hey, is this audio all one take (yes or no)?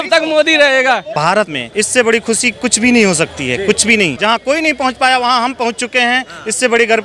no